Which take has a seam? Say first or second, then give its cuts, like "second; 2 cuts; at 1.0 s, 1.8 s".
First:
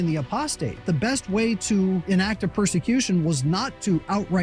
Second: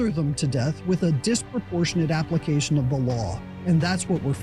first; 2 cuts; at 0.8 s, 2.0 s